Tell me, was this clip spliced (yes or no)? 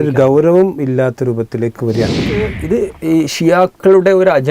yes